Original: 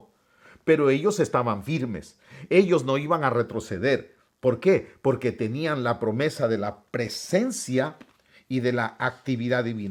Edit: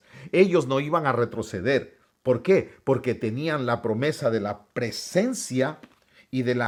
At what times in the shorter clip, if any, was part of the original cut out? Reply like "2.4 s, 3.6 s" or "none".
none